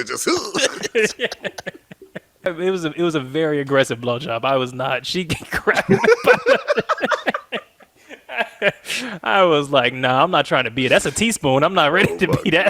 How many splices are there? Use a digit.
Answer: 1